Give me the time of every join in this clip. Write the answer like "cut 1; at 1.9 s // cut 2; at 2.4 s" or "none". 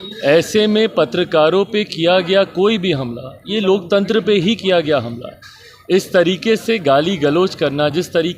none